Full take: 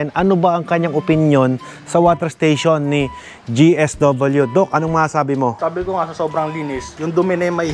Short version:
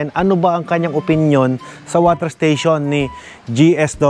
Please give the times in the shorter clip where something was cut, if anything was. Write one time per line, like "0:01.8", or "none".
none

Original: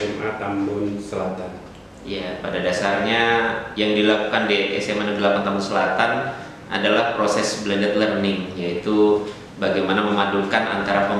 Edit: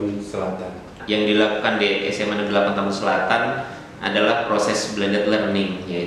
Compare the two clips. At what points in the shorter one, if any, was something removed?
0:01.0

